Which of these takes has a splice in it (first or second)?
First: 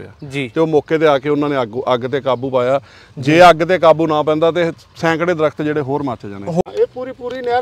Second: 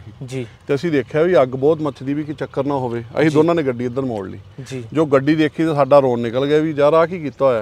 first